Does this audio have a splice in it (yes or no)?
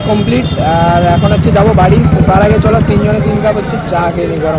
no